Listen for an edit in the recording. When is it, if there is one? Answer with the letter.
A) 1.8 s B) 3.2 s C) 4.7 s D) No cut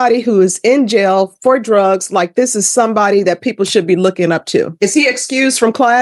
C